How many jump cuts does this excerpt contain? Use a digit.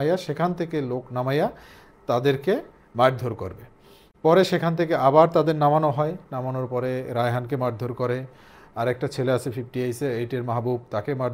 0